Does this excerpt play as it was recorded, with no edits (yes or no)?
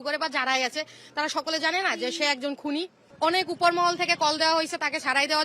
no